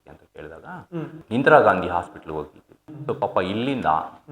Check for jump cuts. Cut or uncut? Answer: cut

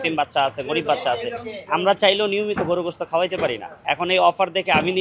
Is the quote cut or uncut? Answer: cut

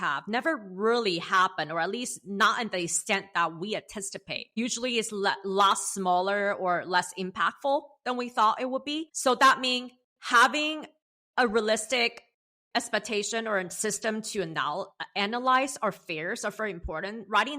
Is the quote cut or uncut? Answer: cut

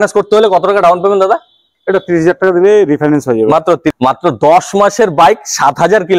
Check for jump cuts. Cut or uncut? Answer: cut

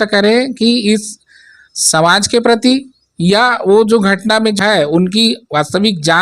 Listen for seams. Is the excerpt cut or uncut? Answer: cut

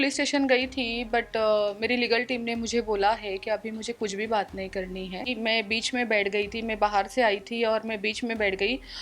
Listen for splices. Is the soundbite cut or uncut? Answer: cut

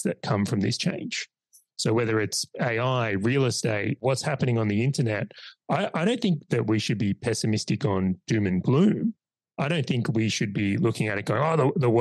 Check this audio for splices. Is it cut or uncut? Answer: uncut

